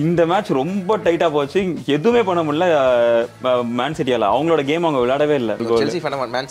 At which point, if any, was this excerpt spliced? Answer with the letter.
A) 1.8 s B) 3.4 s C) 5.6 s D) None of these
C